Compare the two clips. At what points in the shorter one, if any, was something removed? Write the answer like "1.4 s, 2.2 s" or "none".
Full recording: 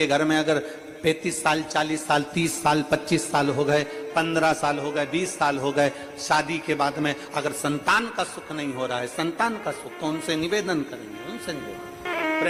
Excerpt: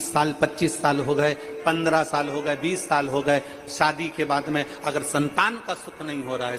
none